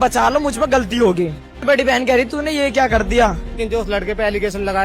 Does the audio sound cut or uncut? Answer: cut